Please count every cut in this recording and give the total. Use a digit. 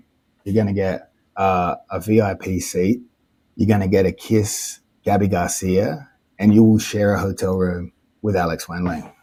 0